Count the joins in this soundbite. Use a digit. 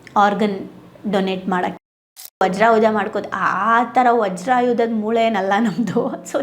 1